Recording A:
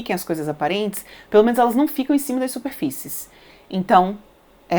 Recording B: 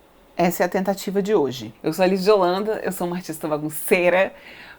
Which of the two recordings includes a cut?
B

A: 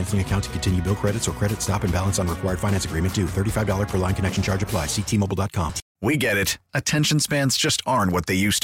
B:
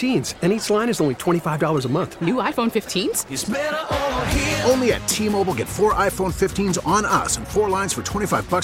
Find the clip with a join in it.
A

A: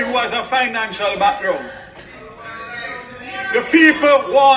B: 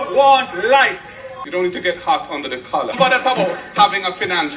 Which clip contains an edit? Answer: B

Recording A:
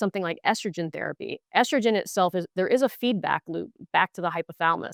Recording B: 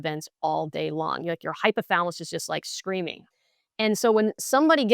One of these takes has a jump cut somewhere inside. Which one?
B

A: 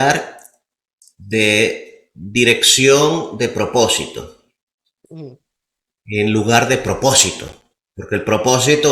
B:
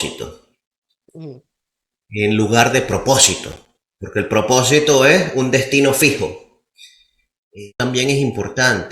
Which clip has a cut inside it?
B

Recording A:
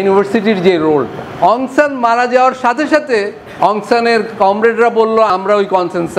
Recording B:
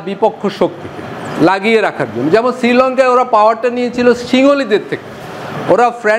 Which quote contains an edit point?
A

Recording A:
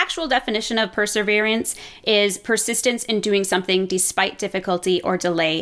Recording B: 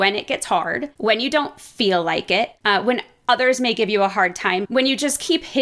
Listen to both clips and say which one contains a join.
B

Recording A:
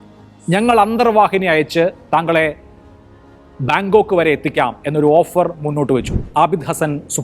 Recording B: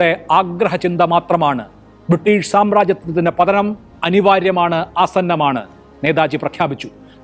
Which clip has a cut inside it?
A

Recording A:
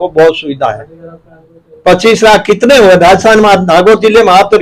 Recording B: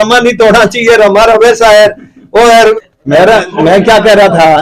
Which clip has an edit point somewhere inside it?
B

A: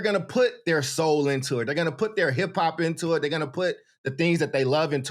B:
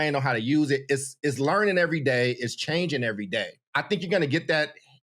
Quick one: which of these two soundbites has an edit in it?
B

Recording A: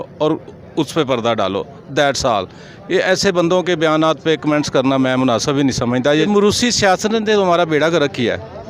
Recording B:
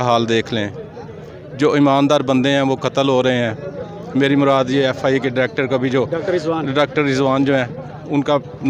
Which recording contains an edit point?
A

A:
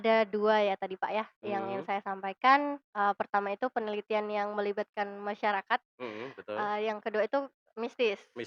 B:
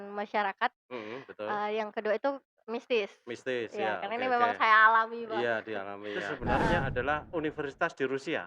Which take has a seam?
B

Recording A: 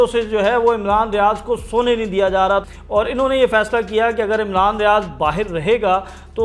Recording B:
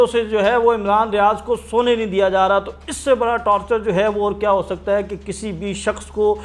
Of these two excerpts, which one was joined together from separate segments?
A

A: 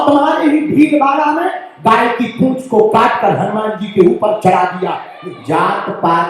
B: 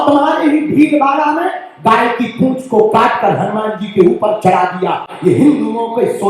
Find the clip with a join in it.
A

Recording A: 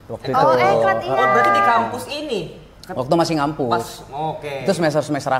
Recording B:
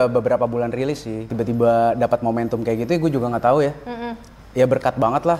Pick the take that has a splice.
B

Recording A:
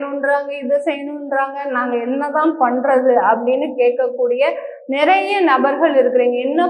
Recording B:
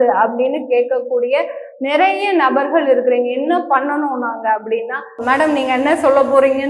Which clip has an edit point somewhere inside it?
B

